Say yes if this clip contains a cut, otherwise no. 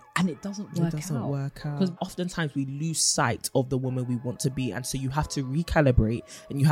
yes